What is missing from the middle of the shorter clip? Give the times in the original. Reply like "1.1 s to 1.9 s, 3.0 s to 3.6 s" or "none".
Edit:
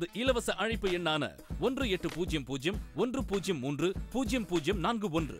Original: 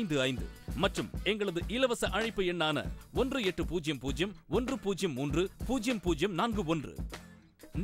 none